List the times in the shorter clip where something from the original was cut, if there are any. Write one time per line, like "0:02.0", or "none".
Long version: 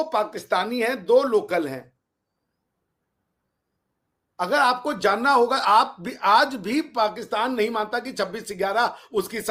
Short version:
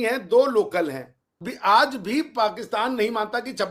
0:01.4

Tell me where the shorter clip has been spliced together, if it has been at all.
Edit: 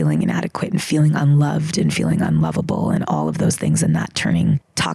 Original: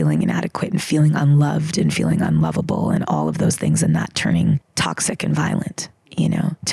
none

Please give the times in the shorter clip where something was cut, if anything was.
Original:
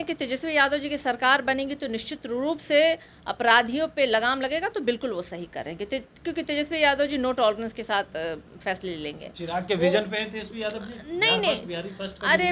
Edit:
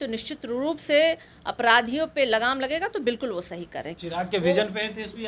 0:03.9

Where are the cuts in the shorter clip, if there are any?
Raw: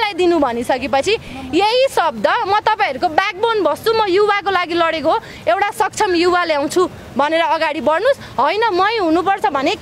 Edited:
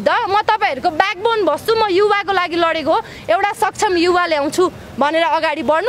none

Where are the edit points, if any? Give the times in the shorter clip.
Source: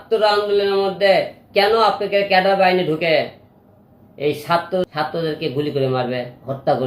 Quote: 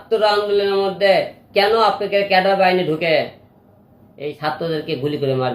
0:04.4

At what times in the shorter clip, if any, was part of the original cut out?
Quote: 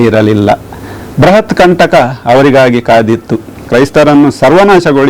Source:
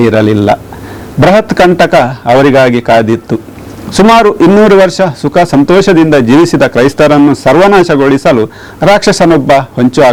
0:03.7

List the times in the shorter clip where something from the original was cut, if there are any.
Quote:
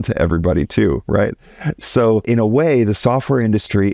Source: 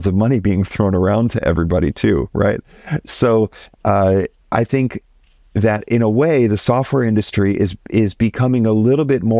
0:02.2

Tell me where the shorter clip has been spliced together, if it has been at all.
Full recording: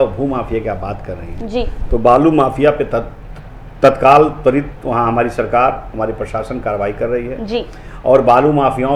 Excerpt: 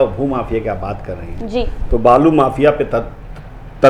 none

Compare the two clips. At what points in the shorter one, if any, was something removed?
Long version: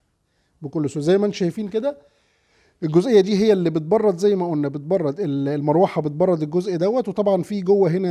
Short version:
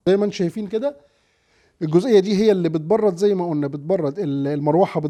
none

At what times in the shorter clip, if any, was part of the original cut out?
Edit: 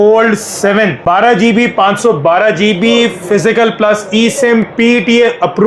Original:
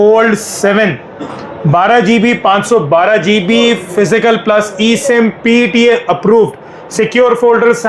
0:01.0

